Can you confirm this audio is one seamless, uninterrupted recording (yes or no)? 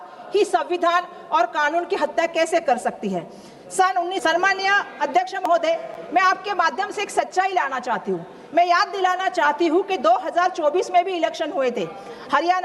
no